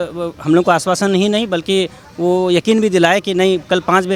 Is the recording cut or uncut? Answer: uncut